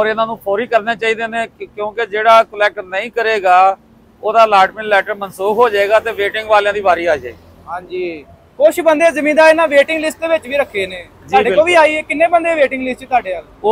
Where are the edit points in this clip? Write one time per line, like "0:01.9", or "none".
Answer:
none

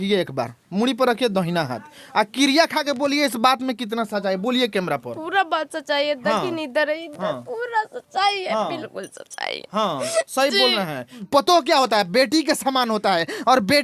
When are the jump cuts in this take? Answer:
0:11.2

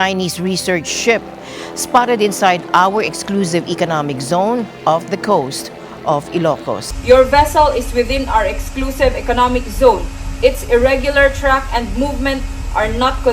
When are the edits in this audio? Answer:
0:06.9

